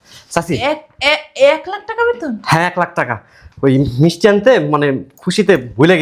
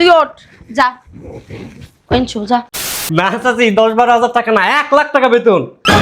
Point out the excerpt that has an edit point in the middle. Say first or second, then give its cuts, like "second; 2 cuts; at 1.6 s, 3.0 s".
second; 1 cut; at 2.9 s